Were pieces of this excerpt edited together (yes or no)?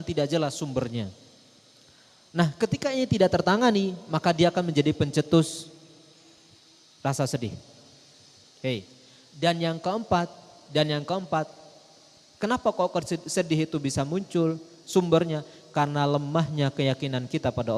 no